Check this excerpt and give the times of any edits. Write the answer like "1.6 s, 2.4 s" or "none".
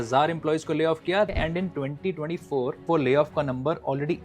1.3 s